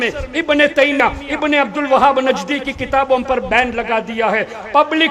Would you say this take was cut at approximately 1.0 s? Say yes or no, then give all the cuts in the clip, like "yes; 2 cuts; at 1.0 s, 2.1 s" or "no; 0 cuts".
yes; 1 cut; at 1.0 s